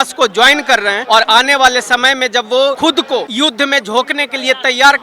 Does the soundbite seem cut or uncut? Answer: cut